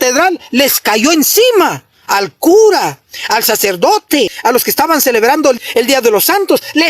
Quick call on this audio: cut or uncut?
cut